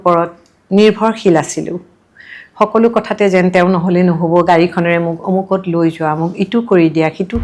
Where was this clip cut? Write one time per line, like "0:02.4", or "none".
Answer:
none